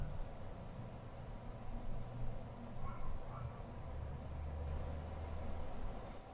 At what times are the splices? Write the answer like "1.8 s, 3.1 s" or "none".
none